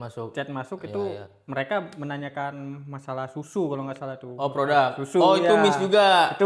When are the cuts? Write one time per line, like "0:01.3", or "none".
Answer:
none